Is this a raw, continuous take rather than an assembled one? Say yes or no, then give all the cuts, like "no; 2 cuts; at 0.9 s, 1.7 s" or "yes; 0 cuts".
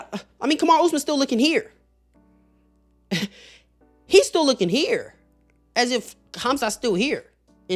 yes; 0 cuts